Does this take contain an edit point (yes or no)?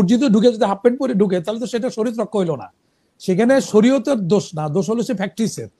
no